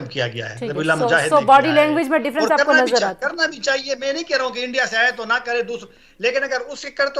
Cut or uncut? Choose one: uncut